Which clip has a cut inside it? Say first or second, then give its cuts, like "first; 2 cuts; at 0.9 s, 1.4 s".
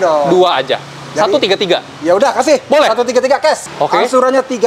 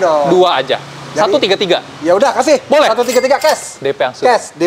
first; 1 cut; at 3.7 s